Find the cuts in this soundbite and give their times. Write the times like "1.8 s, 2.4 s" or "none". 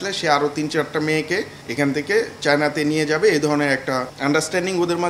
1.6 s, 4.1 s